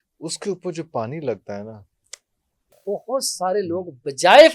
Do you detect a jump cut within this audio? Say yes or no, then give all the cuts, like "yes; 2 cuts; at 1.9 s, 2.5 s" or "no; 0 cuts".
yes; 1 cut; at 2.7 s